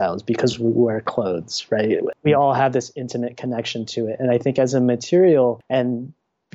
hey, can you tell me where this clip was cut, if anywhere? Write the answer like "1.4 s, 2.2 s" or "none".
2.1 s, 5.6 s